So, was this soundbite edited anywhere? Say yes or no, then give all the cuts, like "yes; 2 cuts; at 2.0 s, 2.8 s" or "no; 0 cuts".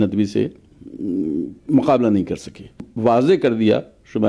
yes; 1 cut; at 2.8 s